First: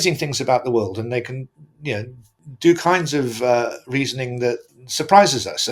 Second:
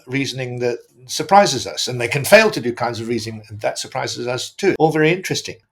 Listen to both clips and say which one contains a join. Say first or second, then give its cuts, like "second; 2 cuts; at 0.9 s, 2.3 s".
second; 1 cut; at 4.8 s